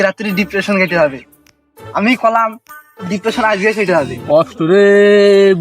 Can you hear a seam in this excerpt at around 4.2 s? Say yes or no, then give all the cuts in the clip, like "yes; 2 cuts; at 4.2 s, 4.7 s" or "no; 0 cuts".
yes; 1 cut; at 4.2 s